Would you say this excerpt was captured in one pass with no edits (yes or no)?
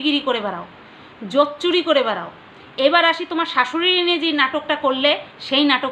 yes